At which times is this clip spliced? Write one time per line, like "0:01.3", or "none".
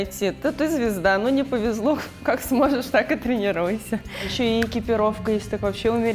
0:04.3